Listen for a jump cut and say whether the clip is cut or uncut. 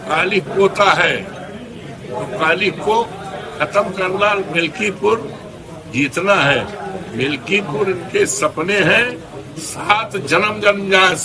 uncut